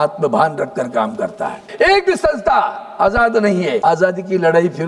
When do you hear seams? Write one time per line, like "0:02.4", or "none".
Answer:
0:01.6
0:03.8